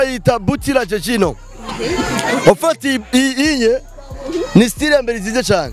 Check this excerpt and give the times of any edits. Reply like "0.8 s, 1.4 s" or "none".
none